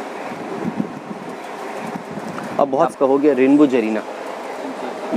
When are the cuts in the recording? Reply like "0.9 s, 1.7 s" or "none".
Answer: 2.9 s